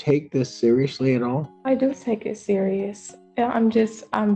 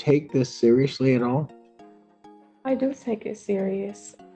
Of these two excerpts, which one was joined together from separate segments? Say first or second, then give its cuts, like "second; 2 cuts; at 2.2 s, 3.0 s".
first; 1 cut; at 1.5 s